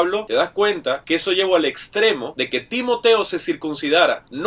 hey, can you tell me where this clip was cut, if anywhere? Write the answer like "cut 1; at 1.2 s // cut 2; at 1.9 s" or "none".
cut 1; at 2.3 s

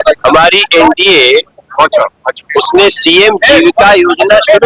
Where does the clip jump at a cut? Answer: none

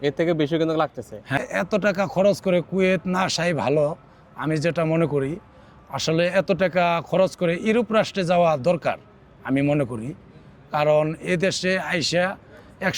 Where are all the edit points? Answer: cut 1; at 1.4 s

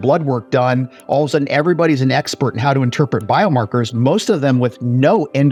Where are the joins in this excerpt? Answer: none

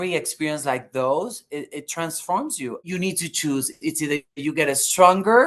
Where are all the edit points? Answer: cut 1; at 2.8 s

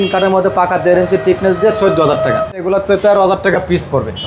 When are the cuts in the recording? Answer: cut 1; at 2.7 s

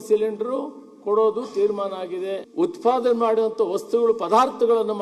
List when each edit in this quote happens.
cut 1; at 2.4 s

